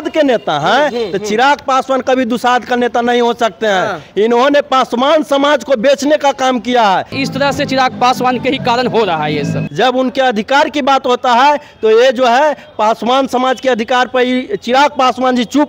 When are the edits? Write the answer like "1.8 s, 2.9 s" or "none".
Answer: 7.2 s, 9.6 s